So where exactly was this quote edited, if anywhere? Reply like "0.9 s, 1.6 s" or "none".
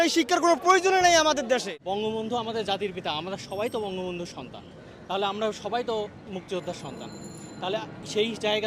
1.7 s